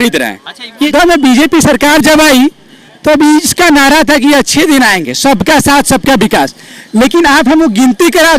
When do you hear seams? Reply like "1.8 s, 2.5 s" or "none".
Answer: 0.9 s